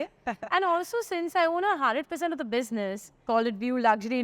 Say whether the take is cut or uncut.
cut